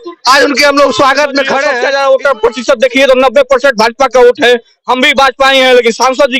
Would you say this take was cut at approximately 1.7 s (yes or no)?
yes